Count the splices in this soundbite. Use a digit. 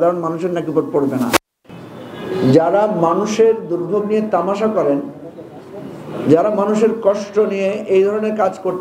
1